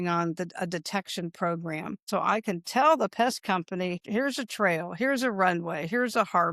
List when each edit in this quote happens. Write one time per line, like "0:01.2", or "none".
0:02.1
0:04.0